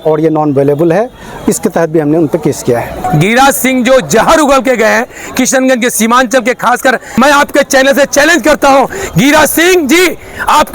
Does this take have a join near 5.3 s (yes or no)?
no